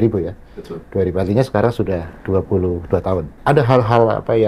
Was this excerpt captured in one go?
no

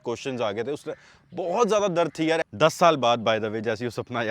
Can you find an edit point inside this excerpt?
yes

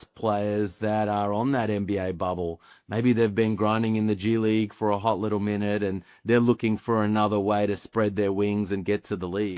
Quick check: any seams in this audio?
no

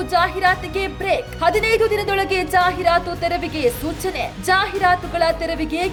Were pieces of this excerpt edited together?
no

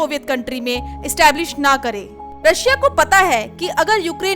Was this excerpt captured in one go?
no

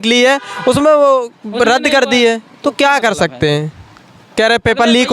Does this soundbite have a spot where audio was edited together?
no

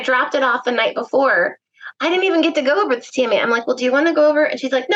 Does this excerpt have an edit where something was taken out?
no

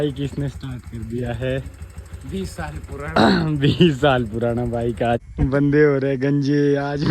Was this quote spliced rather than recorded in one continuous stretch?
yes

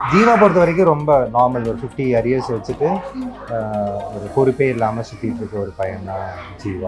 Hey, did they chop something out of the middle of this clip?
no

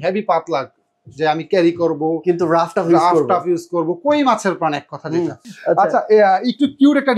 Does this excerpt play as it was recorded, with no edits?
no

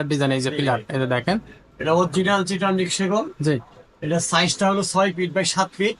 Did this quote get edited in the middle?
no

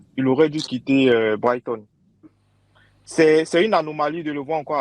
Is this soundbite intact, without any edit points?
no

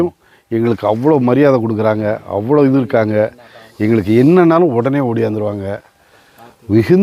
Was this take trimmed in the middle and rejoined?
no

